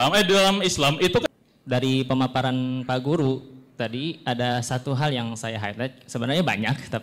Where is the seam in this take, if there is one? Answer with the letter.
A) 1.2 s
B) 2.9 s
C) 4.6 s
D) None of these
A